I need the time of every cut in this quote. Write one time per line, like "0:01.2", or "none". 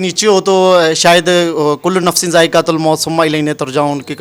none